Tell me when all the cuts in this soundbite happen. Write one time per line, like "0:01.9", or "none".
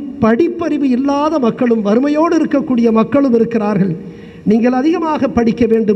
none